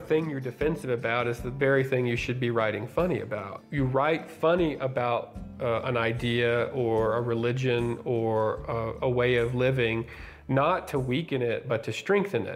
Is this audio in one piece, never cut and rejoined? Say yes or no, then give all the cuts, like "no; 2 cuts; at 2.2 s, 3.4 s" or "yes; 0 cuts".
no; 1 cut; at 3.6 s